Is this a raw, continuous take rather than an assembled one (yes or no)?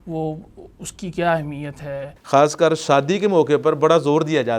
no